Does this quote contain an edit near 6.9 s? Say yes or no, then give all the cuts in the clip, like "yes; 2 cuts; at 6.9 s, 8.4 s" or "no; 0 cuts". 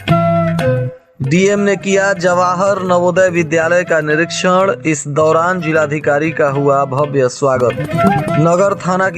no; 1 cut; at 1.0 s